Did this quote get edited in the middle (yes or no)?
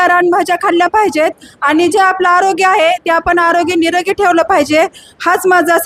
no